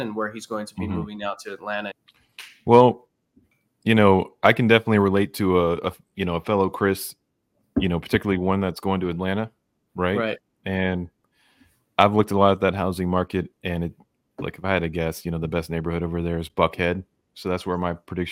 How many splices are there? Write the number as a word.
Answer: one